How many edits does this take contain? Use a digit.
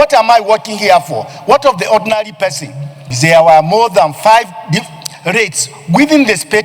1